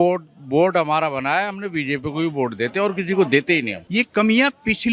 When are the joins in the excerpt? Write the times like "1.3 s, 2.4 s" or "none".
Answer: 3.8 s